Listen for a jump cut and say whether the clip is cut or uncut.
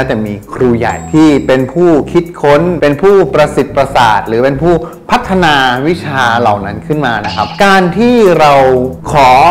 uncut